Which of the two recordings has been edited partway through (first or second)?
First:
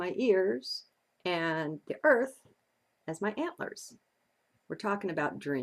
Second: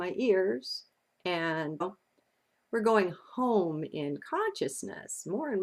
first